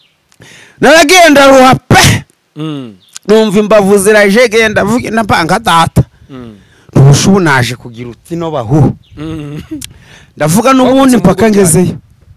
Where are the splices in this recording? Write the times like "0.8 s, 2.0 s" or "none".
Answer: none

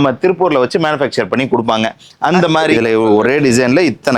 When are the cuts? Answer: 2.7 s

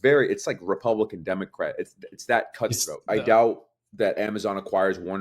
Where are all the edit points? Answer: 2.9 s

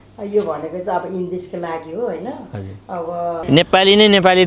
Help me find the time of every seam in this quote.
3.3 s

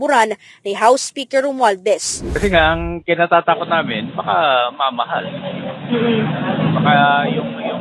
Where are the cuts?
2.2 s

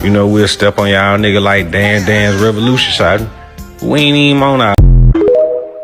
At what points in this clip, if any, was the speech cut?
4.8 s

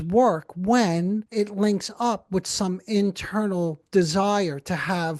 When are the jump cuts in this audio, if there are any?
1.3 s

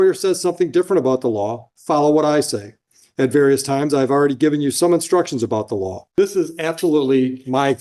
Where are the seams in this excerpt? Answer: 6.0 s

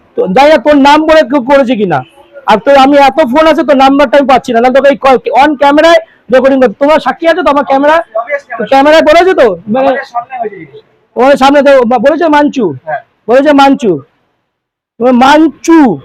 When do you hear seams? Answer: none

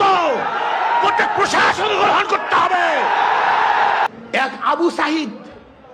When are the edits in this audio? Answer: 4.1 s

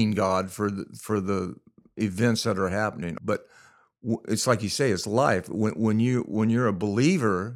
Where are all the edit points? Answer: 3.1 s

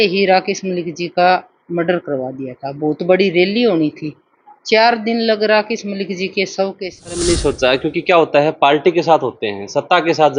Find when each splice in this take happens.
7.1 s

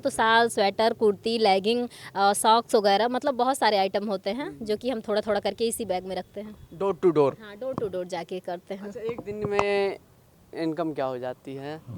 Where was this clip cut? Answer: none

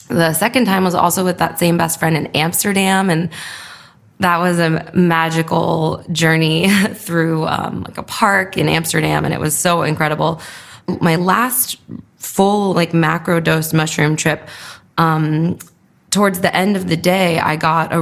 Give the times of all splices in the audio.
none

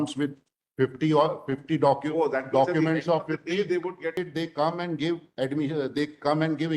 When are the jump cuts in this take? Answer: 4.1 s

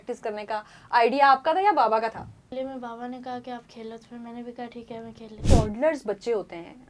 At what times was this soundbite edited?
2.5 s, 5.4 s

